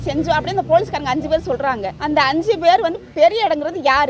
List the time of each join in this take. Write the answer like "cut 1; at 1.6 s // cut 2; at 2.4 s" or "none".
cut 1; at 1.9 s